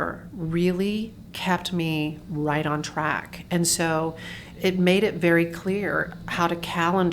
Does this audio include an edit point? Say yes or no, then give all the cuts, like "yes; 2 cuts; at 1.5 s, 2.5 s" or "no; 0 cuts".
yes; 1 cut; at 4.4 s